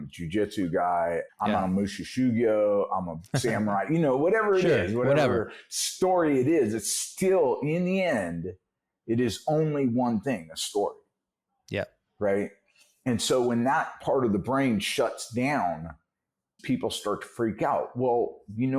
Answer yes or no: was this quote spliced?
yes